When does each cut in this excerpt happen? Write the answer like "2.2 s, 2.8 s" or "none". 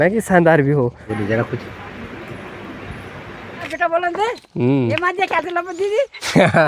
1.0 s, 3.7 s